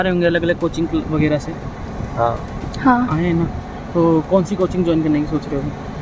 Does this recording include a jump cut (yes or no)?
no